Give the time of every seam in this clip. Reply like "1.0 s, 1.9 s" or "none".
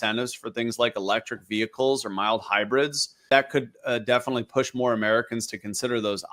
3.3 s